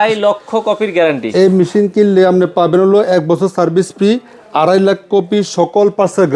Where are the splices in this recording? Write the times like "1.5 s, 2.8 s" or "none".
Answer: none